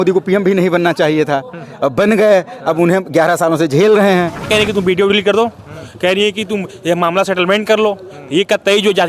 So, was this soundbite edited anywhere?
yes; 1 cut; at 4.4 s

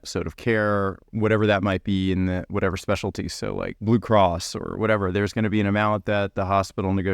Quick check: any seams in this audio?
yes; 2 cuts; at 1.0 s, 3.8 s

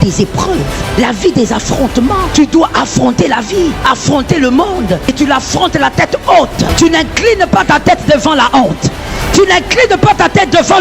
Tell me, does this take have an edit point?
yes; 5 cuts; at 0.9 s, 2.3 s, 3.8 s, 5.1 s, 6.7 s

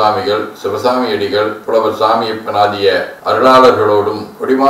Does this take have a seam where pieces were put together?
yes; 1 cut; at 1.6 s

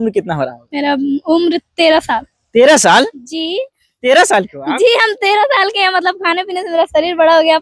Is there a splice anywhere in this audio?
no; 0 cuts

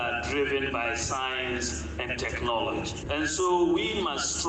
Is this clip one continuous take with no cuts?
no; 1 cut; at 3.0 s

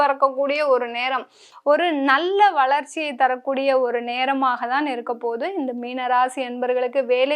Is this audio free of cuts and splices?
no; 1 cut; at 1.5 s

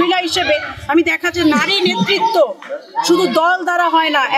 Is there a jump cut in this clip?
no; 0 cuts

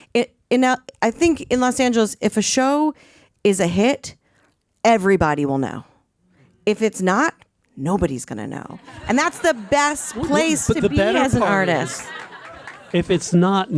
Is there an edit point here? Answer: no; 0 cuts

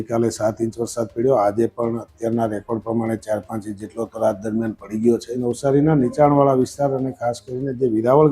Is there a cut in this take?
yes; 1 cut; at 5.4 s

